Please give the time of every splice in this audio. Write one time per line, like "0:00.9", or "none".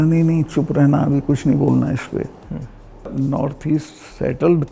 0:03.1